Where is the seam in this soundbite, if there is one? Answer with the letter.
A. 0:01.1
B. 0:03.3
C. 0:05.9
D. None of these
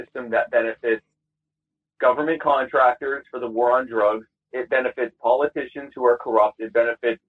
D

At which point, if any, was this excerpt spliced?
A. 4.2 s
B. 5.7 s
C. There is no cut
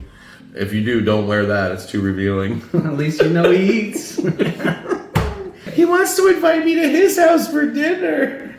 B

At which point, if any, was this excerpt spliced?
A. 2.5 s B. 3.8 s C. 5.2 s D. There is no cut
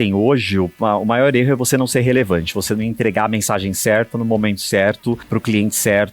C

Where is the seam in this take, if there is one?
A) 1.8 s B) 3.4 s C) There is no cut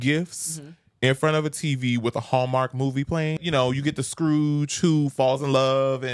B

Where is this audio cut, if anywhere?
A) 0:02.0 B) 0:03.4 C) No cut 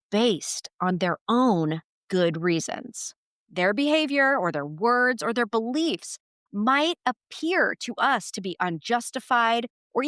B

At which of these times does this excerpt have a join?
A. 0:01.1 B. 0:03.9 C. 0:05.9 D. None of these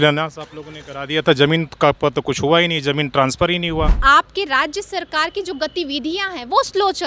B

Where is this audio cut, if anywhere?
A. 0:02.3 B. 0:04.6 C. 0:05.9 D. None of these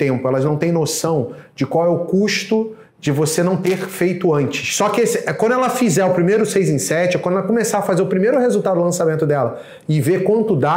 B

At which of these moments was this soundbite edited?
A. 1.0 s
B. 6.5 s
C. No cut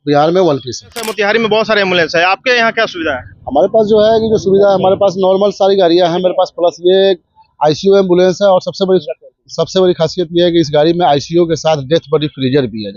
A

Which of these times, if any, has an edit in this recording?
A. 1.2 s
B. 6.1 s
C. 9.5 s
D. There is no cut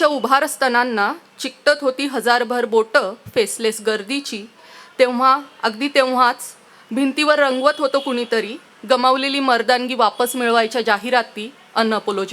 D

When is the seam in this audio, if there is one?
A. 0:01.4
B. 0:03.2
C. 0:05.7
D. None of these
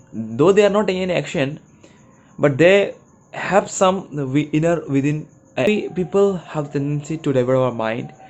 C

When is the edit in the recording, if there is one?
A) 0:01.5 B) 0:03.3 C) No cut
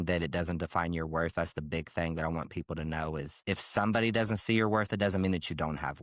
B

